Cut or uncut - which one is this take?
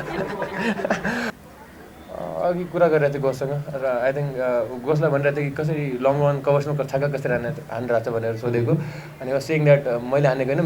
cut